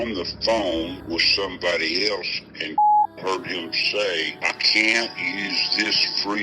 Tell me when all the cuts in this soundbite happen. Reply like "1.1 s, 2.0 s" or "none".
1.0 s, 4.3 s